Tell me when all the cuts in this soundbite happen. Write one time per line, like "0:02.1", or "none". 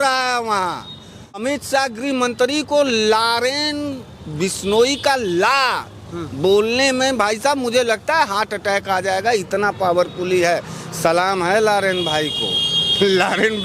0:01.4